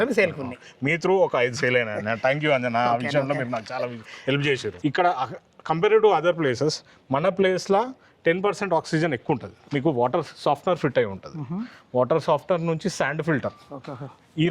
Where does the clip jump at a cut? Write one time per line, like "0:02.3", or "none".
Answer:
0:04.7
0:09.6